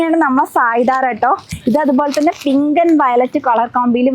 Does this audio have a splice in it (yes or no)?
yes